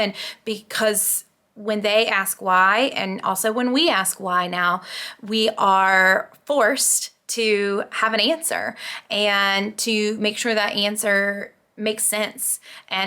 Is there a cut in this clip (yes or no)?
no